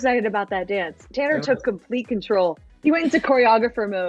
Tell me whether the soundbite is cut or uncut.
uncut